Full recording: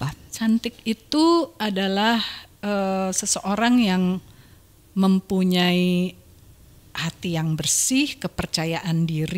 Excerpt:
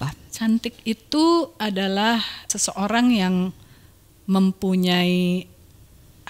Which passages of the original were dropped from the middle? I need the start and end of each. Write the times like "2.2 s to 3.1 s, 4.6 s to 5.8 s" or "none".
2.5 s to 3.2 s